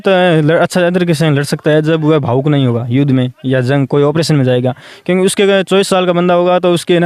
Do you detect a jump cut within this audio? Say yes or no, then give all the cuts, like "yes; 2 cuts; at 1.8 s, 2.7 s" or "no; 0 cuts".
no; 0 cuts